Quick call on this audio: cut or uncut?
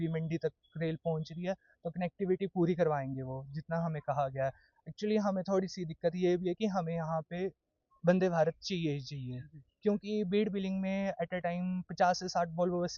uncut